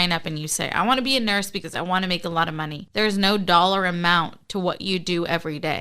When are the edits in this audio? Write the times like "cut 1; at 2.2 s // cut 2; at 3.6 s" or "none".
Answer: cut 1; at 2.8 s